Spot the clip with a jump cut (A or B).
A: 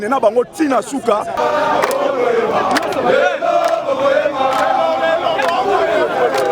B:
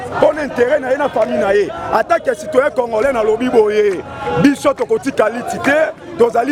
A